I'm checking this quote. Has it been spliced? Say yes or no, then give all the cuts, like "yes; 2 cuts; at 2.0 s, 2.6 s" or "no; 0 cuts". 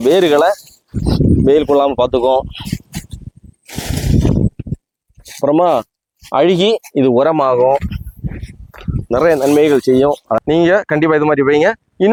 no; 0 cuts